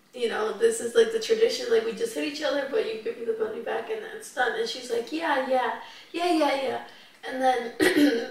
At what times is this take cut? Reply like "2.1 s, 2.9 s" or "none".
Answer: none